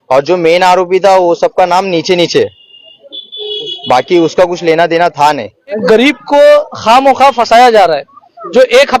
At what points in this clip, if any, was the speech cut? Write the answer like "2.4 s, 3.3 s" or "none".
5.8 s